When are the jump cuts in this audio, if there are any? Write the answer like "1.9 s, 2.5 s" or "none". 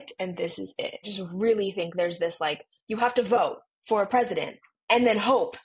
1.1 s